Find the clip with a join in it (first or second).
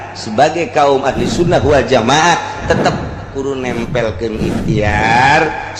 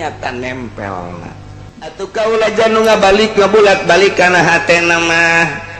second